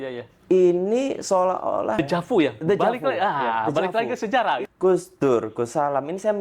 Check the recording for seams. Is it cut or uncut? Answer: cut